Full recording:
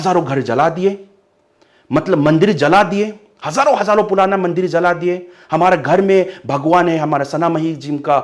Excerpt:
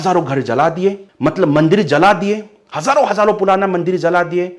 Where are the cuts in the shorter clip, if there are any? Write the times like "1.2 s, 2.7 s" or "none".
1.1 s